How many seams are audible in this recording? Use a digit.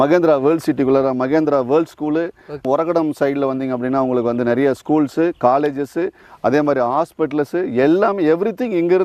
0